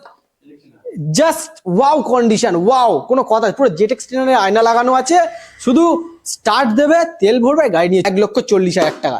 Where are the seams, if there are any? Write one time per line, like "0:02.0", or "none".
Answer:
0:08.1